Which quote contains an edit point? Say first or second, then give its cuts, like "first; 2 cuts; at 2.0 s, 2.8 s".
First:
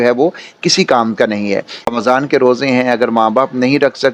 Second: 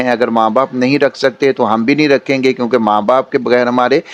first; 1 cut; at 1.9 s